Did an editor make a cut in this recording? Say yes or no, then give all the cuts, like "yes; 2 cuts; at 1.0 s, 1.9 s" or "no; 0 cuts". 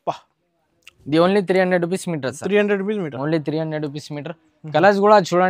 no; 0 cuts